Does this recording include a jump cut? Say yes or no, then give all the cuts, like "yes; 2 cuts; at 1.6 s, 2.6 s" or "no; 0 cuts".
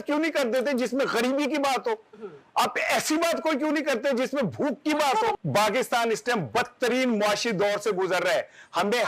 yes; 1 cut; at 5.4 s